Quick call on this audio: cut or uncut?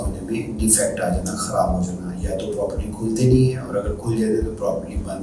uncut